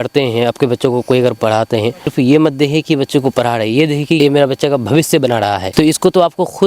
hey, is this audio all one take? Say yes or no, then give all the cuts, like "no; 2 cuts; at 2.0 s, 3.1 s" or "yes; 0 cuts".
no; 3 cuts; at 2.0 s, 4.2 s, 5.6 s